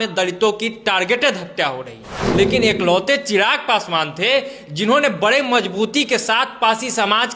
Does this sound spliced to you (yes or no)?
yes